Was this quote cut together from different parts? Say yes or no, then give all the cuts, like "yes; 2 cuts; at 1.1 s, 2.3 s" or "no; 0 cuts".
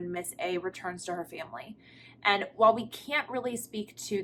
no; 0 cuts